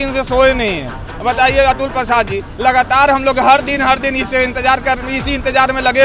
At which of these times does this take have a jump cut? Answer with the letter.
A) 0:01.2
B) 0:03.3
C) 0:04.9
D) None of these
D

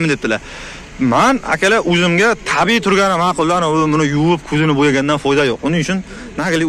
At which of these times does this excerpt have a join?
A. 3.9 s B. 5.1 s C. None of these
C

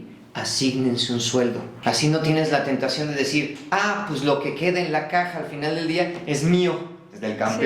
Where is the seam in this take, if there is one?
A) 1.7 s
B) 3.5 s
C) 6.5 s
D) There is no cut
A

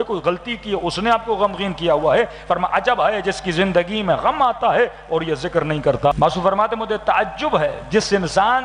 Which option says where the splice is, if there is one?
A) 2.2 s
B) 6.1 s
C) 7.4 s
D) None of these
B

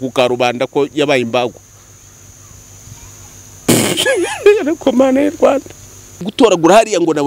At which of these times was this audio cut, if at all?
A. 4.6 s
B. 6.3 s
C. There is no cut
B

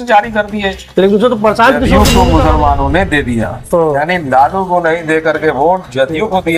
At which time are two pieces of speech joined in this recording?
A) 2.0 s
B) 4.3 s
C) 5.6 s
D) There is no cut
A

